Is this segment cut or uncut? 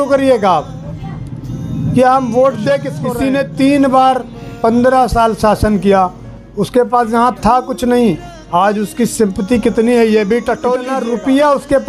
cut